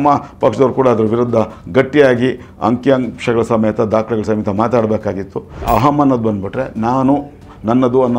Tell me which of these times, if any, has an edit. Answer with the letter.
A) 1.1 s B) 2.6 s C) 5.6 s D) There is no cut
C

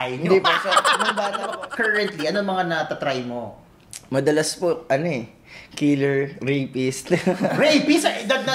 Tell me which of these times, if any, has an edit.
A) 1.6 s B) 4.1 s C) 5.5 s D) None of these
A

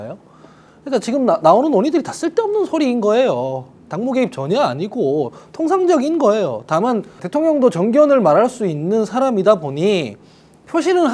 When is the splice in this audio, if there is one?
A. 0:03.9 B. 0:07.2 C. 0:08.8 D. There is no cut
B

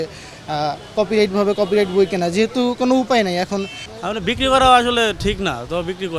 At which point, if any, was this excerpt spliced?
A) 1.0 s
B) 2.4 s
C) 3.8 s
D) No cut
C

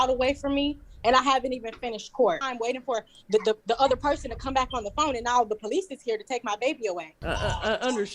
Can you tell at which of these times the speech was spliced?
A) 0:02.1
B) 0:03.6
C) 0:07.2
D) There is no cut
C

